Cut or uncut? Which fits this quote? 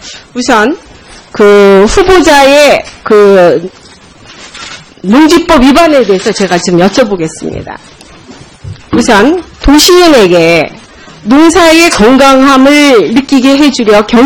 uncut